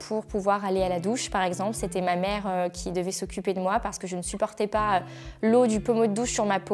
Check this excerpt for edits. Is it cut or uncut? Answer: uncut